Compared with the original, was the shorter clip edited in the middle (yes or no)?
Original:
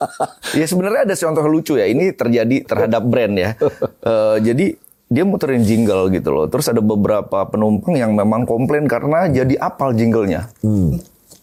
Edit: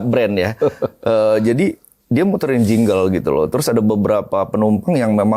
no